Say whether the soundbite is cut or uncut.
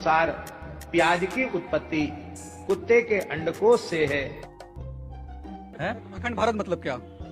cut